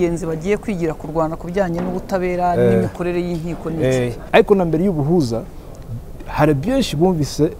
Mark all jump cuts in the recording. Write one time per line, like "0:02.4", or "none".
0:04.2